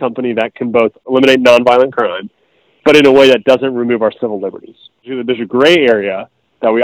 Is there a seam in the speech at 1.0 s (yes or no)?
yes